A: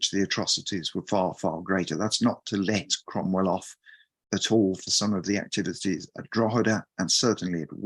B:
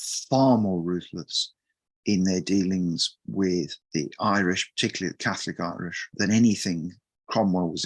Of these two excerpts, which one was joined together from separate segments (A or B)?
B